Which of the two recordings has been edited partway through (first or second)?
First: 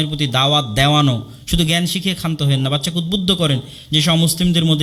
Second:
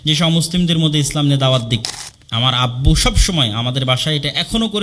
second